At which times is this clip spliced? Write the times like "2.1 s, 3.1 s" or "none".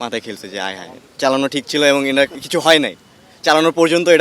1.0 s